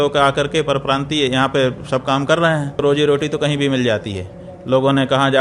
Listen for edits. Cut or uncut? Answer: cut